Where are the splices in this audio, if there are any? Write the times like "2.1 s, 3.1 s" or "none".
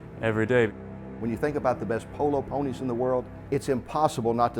0.9 s, 3.4 s